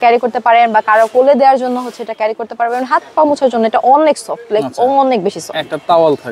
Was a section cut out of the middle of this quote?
no; 0 cuts

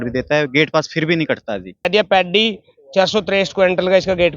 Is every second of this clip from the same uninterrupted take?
no; 1 cut; at 1.9 s

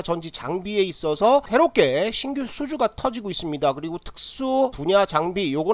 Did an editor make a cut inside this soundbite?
no; 0 cuts

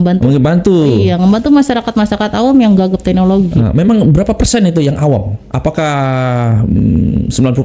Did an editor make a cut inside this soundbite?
no; 0 cuts

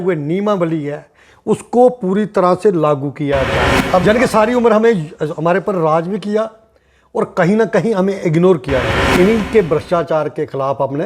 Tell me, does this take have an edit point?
yes; 2 cuts; at 3.8 s, 9.1 s

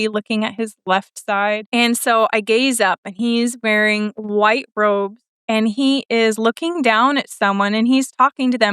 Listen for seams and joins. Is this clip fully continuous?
no; 1 cut; at 1.6 s

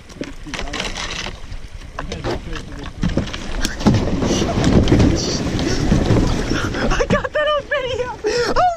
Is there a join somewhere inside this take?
no; 0 cuts

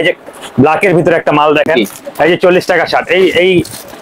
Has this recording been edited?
yes; 1 cut; at 1.7 s

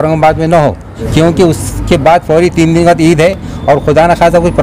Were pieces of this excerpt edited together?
yes; 1 cut; at 1.0 s

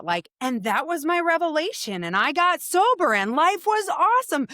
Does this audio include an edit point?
no; 0 cuts

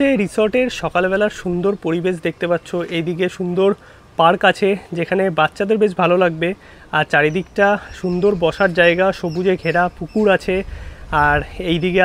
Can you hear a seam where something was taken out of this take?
no; 0 cuts

